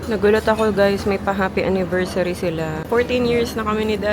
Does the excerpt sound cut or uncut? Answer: cut